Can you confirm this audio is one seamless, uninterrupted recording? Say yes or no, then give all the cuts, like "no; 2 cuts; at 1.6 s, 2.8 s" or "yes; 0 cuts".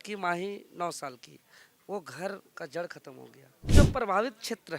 no; 1 cut; at 3.7 s